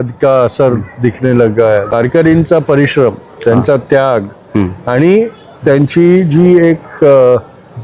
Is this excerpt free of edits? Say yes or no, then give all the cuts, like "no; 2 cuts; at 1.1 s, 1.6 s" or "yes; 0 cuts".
no; 1 cut; at 1.9 s